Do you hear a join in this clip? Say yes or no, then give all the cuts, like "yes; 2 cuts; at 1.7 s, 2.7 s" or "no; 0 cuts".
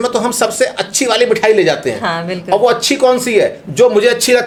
no; 0 cuts